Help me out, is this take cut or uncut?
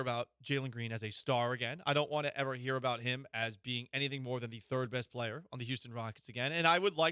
uncut